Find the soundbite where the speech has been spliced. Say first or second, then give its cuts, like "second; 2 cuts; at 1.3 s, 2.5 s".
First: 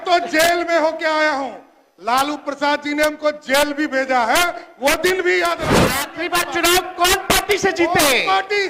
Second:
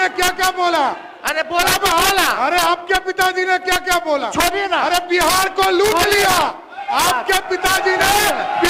first; 1 cut; at 5.7 s